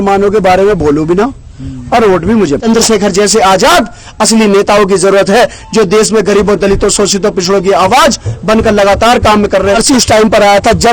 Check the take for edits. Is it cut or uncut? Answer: cut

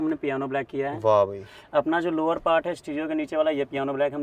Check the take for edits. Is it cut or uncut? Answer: uncut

